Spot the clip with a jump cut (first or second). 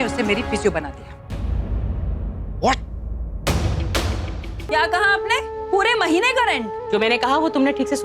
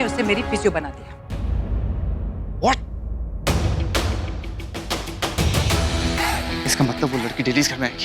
first